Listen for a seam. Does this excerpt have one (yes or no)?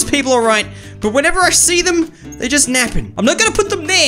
yes